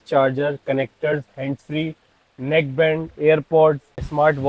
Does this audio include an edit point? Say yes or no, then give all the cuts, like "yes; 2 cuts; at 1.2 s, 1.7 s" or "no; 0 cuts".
no; 0 cuts